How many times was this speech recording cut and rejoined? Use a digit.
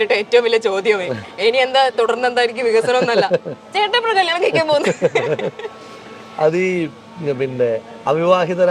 0